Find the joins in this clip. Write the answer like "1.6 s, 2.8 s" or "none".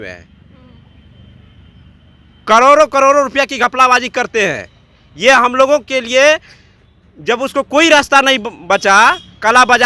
none